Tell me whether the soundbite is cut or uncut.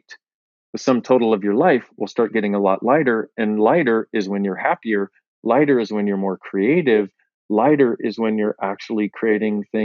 uncut